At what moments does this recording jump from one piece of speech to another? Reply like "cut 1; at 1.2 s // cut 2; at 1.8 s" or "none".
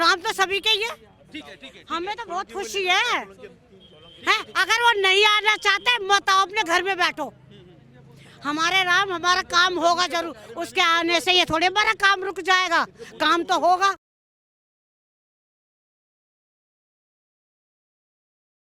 none